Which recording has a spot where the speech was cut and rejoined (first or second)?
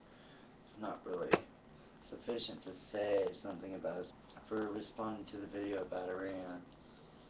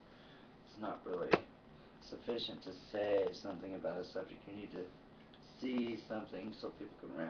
second